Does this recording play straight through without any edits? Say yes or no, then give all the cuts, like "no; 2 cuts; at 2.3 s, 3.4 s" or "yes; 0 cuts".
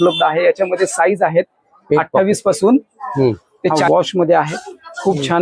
no; 1 cut; at 3.8 s